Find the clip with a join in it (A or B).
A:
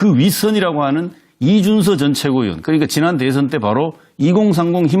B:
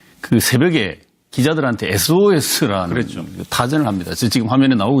A